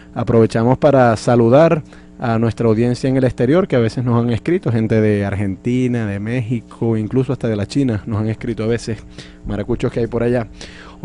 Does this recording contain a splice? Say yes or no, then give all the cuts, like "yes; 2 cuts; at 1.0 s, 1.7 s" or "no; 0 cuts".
yes; 1 cut; at 5.0 s